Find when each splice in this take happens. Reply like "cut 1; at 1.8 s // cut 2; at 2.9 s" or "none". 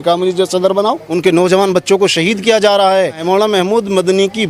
cut 1; at 1.1 s // cut 2; at 3.2 s